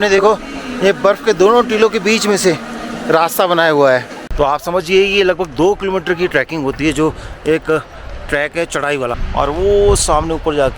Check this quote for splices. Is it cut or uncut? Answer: cut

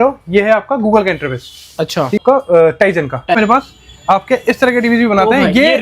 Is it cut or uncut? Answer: cut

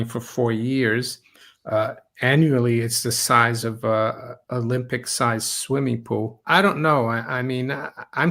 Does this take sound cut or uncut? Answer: cut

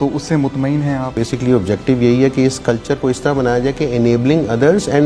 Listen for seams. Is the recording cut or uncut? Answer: cut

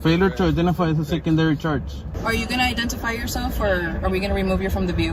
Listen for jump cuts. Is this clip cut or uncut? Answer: cut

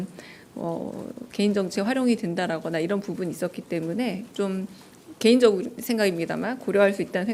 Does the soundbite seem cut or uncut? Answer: uncut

